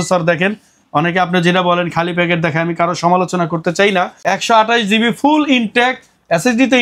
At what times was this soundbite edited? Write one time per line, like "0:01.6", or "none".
0:04.1